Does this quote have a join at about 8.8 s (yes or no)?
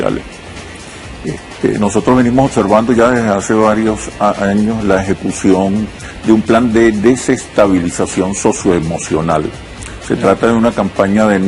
no